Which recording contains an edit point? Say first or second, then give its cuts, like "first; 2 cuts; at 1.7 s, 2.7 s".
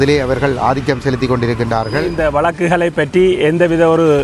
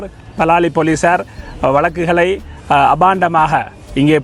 first; 1 cut; at 2.1 s